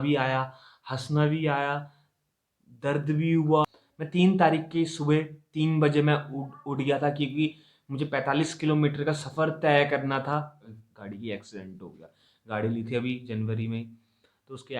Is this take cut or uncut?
cut